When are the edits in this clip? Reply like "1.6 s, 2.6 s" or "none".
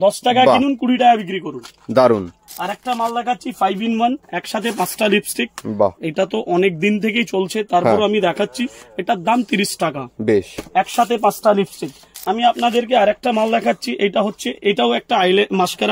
2.4 s, 12.1 s